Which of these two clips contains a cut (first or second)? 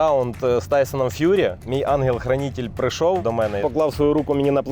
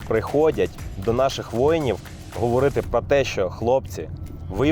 first